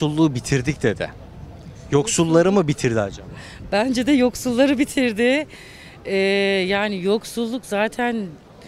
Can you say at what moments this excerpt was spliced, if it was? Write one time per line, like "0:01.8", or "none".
none